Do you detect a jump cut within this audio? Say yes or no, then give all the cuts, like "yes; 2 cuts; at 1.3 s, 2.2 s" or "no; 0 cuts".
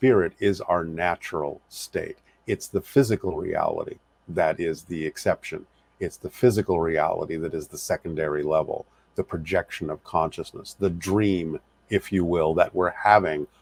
no; 0 cuts